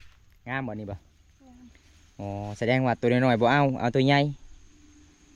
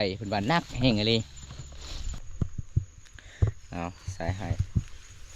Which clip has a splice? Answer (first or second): second